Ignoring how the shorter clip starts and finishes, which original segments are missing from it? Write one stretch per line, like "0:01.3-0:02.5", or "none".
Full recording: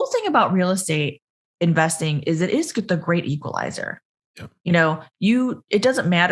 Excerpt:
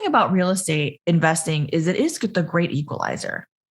0:01.1-0:01.5